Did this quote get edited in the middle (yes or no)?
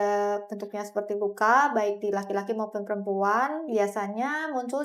no